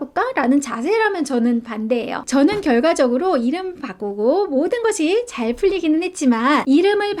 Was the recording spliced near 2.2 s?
yes; 1 cut; at 2.2 s

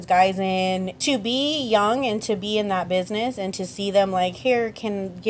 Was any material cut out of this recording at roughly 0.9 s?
yes; 1 cut; at 0.9 s

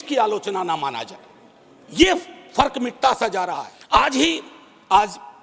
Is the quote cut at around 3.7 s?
yes; 1 cut; at 3.7 s

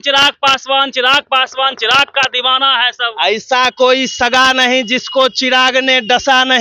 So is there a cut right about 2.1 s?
no; 0 cuts

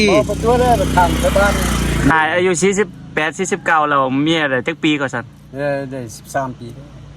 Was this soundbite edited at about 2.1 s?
yes; 1 cut; at 2.1 s

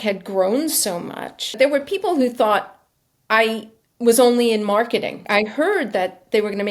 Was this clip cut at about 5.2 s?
yes; 2 cuts; at 1.6 s, 5.2 s

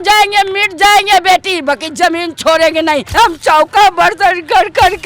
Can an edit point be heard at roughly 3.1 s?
yes; 1 cut; at 3.1 s

